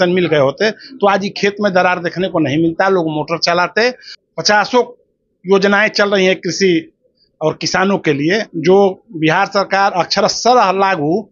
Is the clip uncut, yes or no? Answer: no